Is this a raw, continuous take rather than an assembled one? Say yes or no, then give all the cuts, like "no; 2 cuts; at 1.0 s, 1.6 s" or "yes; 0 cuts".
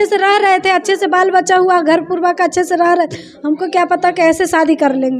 yes; 0 cuts